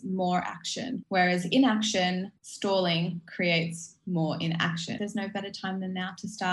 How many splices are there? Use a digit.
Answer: 3